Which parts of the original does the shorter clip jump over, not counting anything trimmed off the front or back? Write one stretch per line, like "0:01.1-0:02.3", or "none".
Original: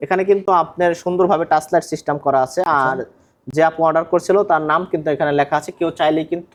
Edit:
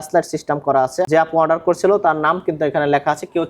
0:02.7-0:03.5